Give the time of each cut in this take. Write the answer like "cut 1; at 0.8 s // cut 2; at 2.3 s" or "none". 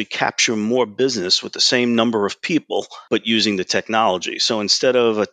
cut 1; at 2.9 s